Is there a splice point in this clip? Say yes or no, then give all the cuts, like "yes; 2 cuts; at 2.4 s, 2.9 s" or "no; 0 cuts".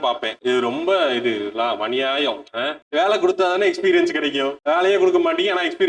yes; 1 cut; at 2.8 s